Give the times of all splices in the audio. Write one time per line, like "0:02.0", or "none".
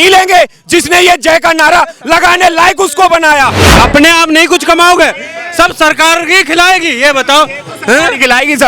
0:03.7